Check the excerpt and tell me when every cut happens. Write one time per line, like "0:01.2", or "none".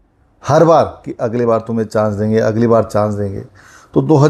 none